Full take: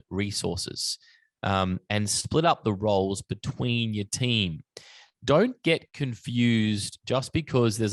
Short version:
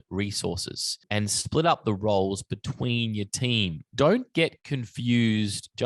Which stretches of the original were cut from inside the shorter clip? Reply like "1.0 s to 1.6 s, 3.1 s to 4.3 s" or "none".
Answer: 1.0 s to 1.8 s, 4.6 s to 5.1 s